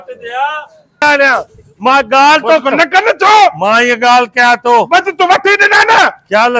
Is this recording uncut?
no; 1 cut; at 1.0 s

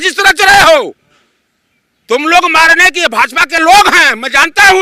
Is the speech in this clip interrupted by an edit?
no; 0 cuts

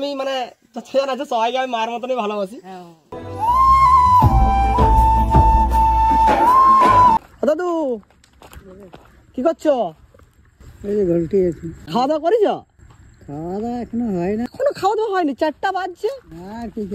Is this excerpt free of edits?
no; 3 cuts; at 7.2 s, 11.7 s, 14.5 s

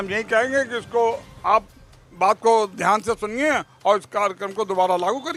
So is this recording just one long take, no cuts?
yes; 0 cuts

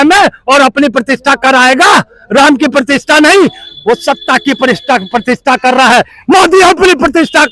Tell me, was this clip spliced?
no; 0 cuts

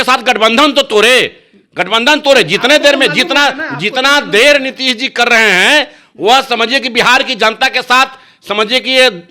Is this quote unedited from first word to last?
yes; 0 cuts

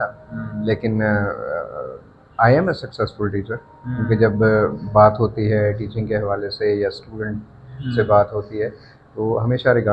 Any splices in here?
no; 0 cuts

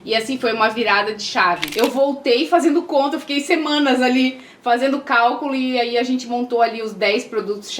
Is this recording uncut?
no; 1 cut; at 1.7 s

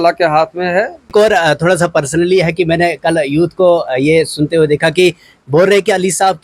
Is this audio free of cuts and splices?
no; 1 cut; at 1.1 s

